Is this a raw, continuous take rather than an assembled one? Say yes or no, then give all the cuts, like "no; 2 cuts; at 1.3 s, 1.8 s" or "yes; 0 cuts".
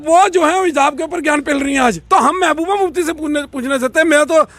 no; 1 cut; at 1.8 s